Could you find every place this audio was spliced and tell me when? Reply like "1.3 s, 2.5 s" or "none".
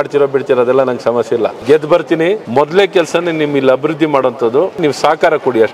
1.6 s, 2.4 s, 4.8 s